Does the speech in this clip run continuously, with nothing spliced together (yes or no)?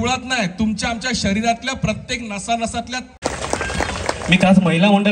no